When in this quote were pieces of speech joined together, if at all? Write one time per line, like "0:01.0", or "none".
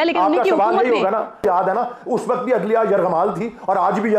0:01.4

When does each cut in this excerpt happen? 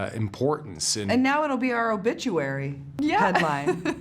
0:02.8

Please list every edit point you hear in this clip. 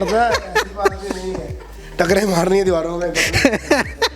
none

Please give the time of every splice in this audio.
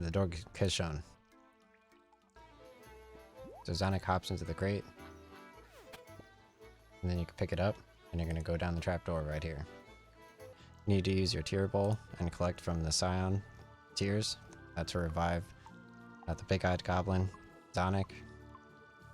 0:02.4
0:10.4

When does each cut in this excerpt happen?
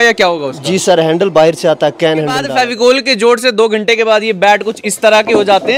0:02.5

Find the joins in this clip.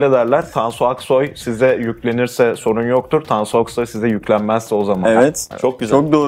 none

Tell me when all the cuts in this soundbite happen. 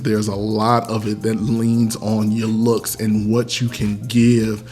none

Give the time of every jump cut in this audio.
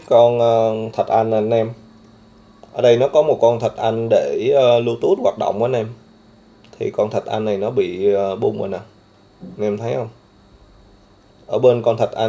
none

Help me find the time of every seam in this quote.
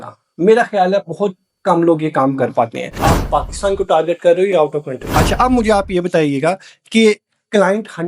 0:02.9
0:05.0

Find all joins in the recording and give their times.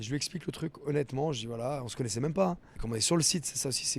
0:02.7

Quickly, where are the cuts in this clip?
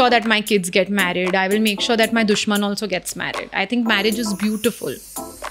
none

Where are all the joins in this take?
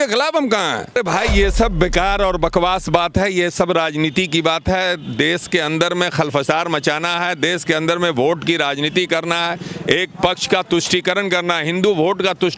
0:00.9

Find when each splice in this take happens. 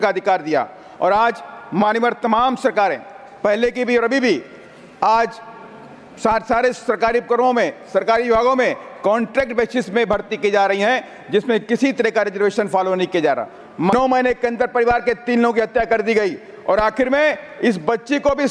0:13.9

